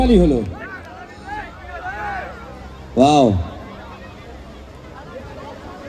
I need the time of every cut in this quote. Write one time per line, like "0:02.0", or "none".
none